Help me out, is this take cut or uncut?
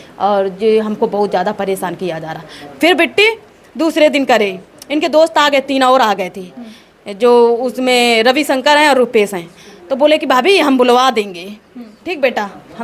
uncut